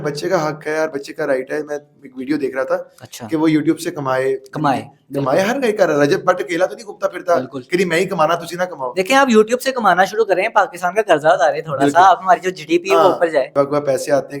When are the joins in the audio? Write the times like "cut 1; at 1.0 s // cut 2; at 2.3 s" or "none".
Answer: cut 1; at 13.5 s